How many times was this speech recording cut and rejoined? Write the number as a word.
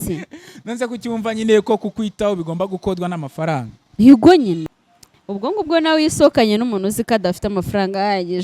one